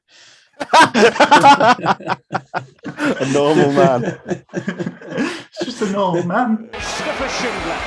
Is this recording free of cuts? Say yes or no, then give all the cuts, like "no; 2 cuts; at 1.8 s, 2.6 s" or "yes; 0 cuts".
no; 1 cut; at 6.8 s